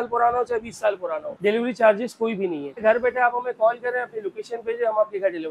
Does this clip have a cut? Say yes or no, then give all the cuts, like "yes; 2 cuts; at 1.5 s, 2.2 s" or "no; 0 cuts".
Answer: yes; 2 cuts; at 1.3 s, 2.7 s